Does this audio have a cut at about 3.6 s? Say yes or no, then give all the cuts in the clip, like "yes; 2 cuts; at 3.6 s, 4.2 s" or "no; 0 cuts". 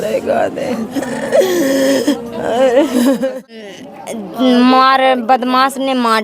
yes; 1 cut; at 3.6 s